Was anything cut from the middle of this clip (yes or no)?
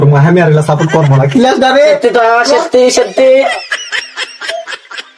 yes